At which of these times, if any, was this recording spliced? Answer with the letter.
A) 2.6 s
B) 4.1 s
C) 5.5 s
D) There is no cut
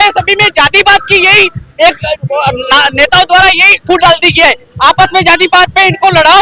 D